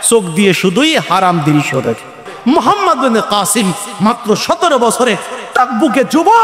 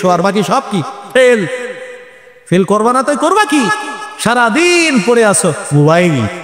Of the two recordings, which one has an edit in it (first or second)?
first